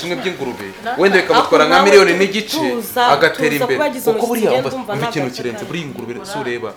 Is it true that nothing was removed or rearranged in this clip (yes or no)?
yes